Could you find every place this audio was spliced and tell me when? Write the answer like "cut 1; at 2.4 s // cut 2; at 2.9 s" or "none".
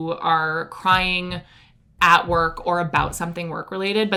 none